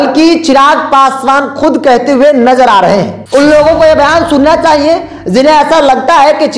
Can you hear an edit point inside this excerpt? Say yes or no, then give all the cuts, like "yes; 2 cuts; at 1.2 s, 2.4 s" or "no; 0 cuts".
yes; 1 cut; at 3.2 s